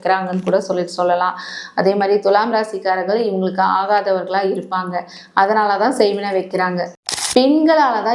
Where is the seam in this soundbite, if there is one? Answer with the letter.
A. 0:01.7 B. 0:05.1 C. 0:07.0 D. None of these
C